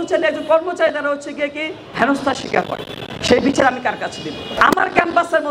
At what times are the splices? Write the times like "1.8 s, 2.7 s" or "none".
1.8 s, 4.5 s